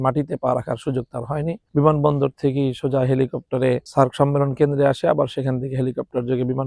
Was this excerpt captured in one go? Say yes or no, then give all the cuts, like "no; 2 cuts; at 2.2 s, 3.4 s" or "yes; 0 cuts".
yes; 0 cuts